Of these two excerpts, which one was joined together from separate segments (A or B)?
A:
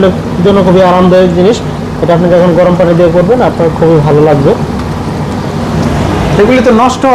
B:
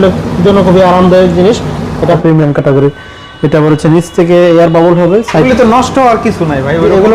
B